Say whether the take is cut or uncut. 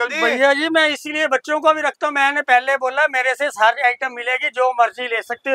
uncut